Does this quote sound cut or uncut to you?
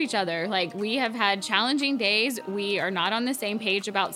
uncut